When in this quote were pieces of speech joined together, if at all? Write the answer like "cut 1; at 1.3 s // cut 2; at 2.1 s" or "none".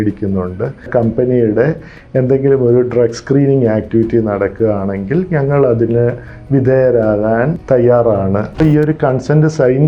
cut 1; at 0.9 s // cut 2; at 7.6 s // cut 3; at 8.6 s